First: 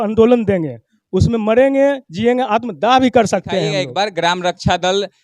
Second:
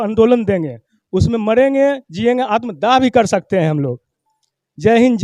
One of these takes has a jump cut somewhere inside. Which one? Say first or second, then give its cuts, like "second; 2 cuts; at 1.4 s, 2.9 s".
first; 1 cut; at 3.8 s